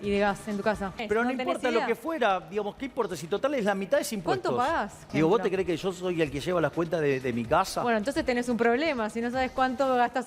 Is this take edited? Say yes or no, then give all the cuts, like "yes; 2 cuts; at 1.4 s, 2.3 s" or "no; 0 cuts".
yes; 2 cuts; at 1.0 s, 5.0 s